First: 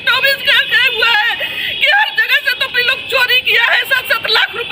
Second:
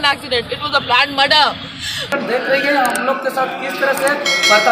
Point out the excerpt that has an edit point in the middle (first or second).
second